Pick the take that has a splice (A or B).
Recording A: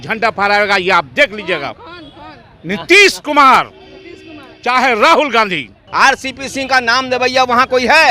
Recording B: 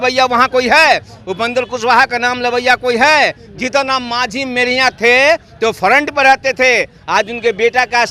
A